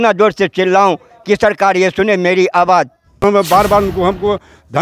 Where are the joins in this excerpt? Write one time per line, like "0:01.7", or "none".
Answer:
0:03.2